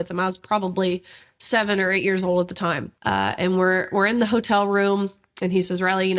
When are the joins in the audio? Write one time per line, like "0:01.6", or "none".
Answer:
0:02.9